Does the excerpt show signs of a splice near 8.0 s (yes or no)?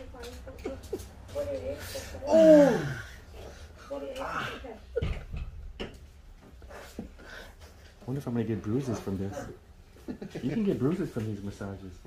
yes